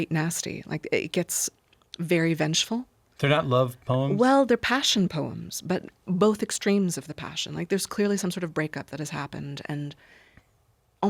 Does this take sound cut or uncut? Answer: uncut